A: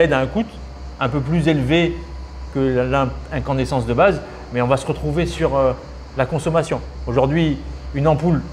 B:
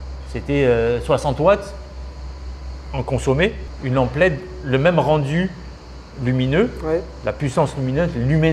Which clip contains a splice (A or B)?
B